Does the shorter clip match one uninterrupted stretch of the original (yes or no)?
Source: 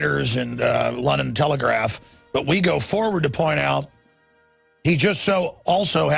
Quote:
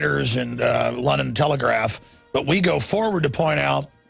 yes